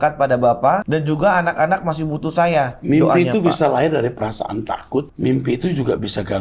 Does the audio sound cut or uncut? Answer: cut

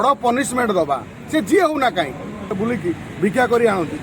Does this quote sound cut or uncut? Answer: cut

